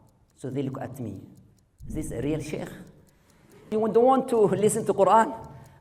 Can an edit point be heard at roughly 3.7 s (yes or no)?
yes